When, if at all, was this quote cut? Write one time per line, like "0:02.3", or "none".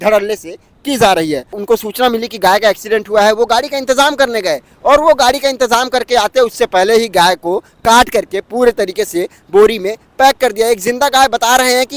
0:01.6